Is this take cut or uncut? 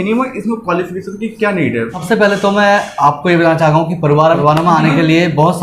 cut